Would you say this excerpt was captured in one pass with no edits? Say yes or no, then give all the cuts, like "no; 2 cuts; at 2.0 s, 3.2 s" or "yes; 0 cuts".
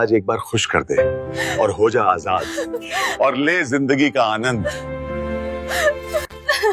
yes; 0 cuts